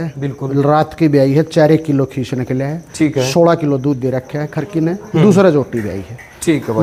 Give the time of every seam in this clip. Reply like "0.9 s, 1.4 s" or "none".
none

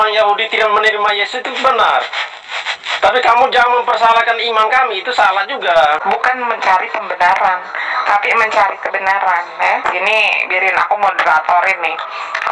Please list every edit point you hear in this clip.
6.0 s, 9.9 s

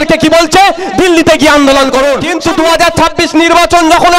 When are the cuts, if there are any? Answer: 2.3 s

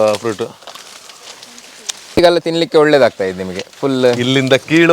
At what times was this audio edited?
2.2 s

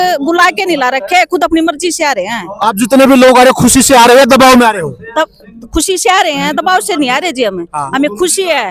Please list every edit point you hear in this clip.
none

